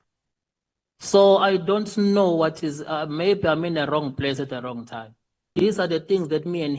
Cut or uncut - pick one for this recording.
cut